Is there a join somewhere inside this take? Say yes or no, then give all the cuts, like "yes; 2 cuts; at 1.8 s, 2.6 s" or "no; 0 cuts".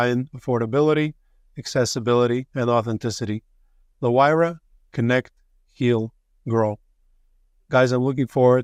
no; 0 cuts